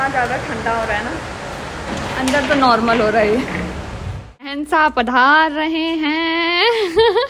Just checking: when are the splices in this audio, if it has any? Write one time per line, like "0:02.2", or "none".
0:04.5